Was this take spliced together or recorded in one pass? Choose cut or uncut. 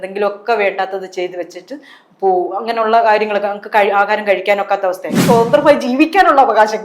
cut